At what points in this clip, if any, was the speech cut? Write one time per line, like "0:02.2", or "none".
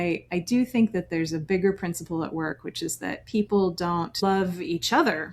0:04.2